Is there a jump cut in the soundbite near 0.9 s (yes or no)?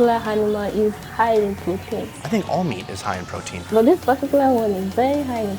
no